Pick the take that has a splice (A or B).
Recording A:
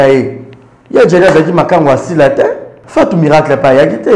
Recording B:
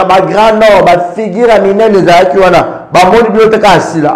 A